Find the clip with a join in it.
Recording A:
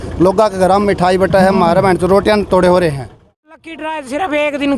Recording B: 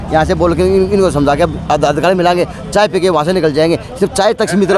A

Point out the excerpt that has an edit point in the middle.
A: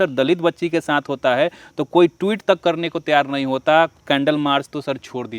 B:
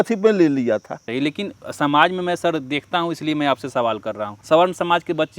B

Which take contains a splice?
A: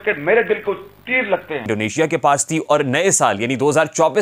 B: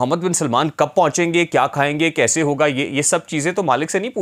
A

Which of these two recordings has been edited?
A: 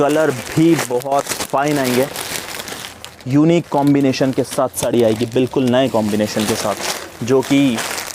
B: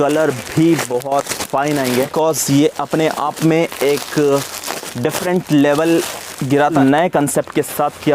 B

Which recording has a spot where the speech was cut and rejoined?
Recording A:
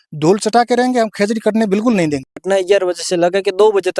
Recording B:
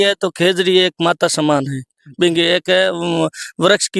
A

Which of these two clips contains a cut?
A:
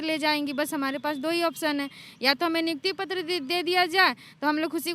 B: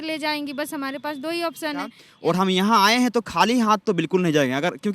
B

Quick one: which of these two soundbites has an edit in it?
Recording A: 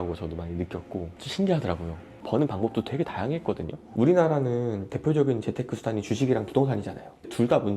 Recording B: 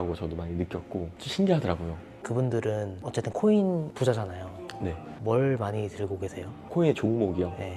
A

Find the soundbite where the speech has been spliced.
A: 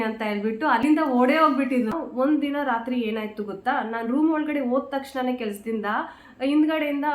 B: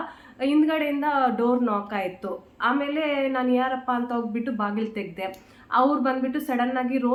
A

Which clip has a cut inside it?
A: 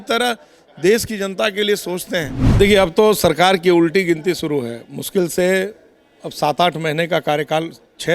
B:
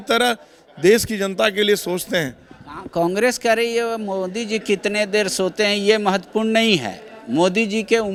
A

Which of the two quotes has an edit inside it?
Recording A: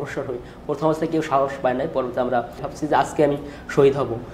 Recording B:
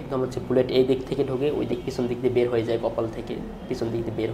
A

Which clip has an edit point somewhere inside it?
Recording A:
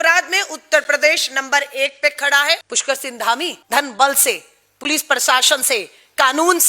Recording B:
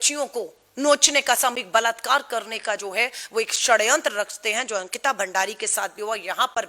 A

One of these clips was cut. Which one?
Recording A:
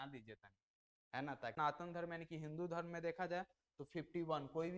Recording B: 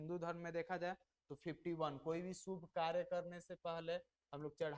A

